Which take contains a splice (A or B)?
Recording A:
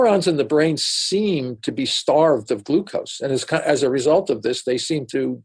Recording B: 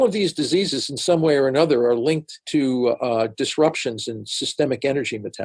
B